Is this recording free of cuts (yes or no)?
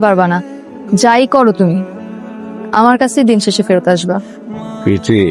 yes